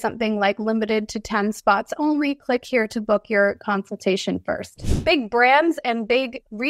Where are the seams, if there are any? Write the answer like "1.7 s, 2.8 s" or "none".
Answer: 4.9 s